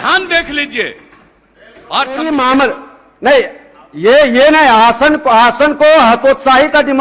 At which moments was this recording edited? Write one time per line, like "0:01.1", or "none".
0:02.2